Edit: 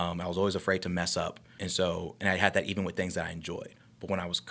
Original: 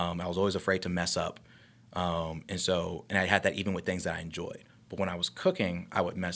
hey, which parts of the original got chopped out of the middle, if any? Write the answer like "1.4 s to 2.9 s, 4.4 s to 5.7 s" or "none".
1.6 s to 2.5 s